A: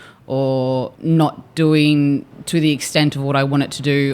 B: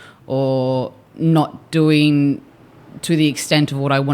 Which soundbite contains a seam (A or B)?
A